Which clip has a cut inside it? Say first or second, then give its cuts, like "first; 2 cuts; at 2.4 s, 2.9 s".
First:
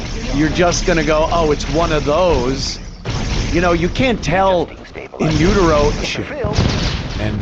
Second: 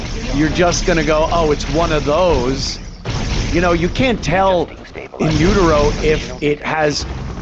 first; 1 cut; at 6.0 s